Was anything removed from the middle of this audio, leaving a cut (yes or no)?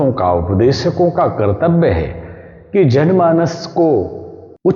no